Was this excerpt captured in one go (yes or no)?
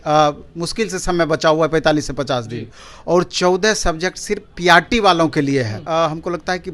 no